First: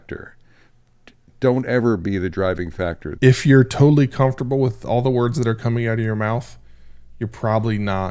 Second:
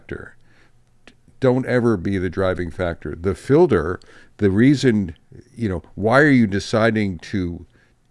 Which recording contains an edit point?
first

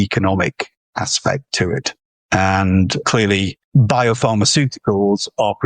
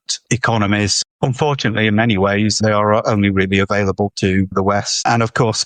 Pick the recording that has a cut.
first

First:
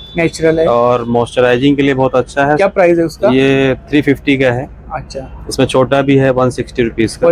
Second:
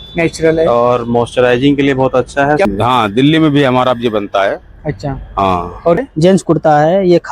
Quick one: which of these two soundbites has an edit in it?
second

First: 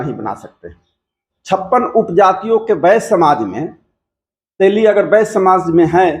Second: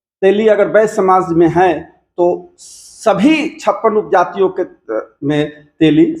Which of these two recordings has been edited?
first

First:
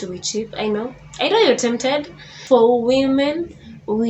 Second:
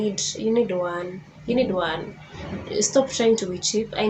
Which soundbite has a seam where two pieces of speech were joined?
first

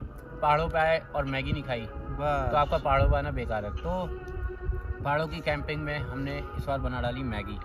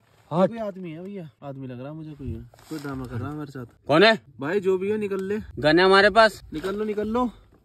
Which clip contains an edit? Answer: second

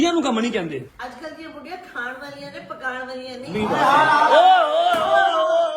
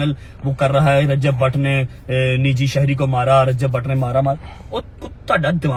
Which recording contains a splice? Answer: first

